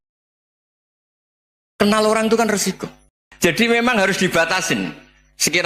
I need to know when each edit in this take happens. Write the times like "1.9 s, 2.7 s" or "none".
3.3 s